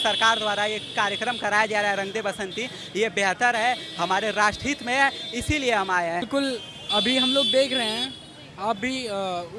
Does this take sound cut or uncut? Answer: cut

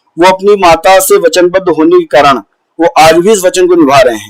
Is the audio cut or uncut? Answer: uncut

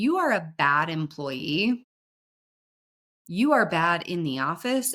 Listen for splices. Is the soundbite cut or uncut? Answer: uncut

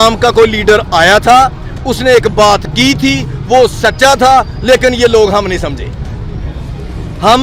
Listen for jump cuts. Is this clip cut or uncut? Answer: uncut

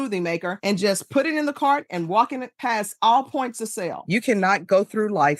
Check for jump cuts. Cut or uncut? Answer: cut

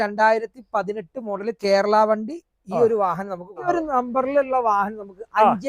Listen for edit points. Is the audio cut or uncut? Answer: cut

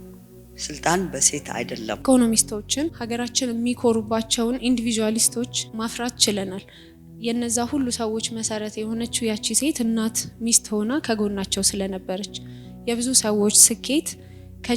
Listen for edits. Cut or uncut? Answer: cut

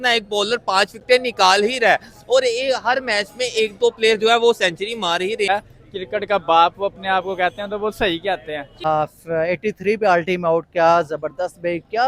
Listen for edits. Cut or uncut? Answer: cut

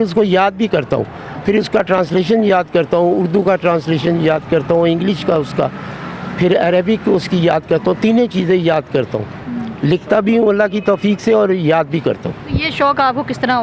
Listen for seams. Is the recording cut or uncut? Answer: uncut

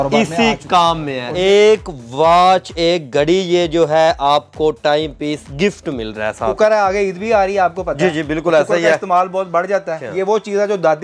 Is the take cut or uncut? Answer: cut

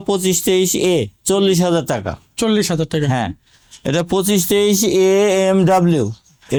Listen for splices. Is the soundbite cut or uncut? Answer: uncut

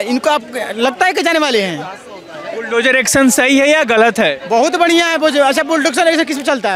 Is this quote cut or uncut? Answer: uncut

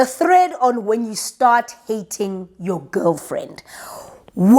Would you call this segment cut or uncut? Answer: uncut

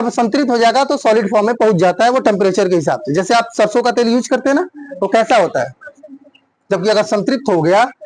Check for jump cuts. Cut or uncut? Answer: uncut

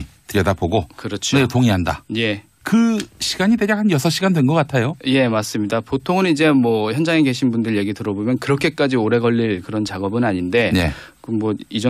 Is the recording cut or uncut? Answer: cut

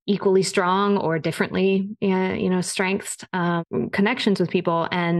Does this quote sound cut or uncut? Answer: uncut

